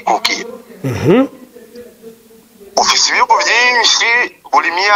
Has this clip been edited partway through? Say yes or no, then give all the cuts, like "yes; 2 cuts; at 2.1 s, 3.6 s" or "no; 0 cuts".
no; 0 cuts